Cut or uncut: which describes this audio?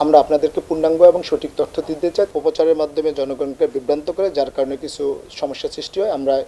cut